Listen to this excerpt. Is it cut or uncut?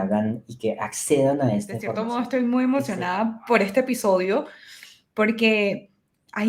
cut